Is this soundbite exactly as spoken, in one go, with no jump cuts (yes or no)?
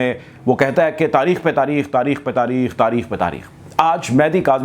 yes